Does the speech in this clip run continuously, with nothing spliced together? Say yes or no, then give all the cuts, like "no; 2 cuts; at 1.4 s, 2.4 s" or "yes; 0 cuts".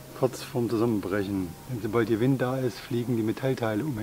yes; 0 cuts